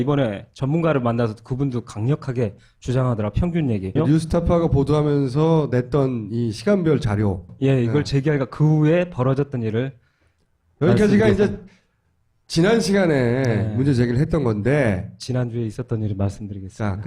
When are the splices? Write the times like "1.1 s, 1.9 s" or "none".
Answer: 15.7 s

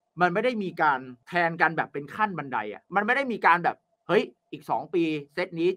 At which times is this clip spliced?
2.8 s

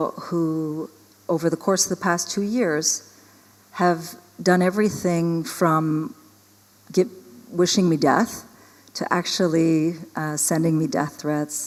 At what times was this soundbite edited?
none

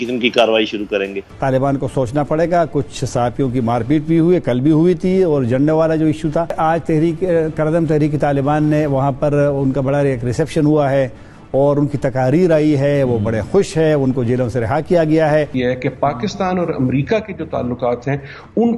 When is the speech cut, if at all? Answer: 1.2 s, 6.6 s, 15.5 s

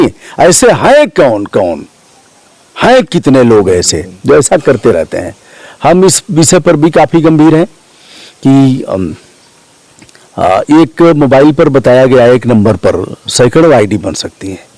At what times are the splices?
none

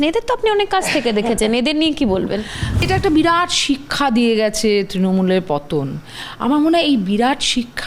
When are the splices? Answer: 2.9 s

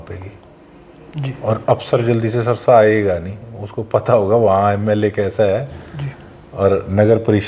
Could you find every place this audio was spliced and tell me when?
none

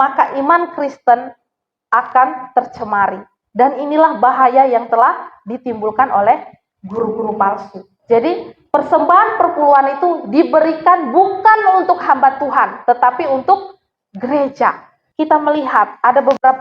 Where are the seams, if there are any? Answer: 7.9 s, 15.0 s

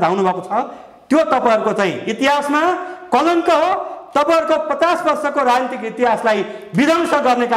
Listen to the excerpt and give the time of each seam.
none

